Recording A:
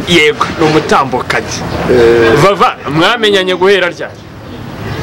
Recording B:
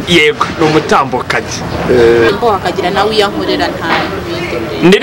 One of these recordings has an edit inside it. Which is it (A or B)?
B